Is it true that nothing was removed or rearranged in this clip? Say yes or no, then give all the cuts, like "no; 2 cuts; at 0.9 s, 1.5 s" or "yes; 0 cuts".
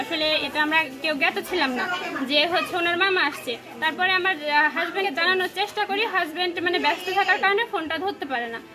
yes; 0 cuts